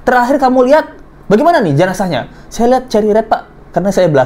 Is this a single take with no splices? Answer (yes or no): yes